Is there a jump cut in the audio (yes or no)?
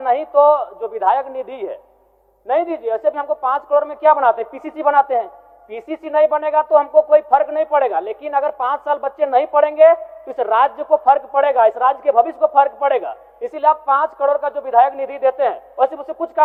no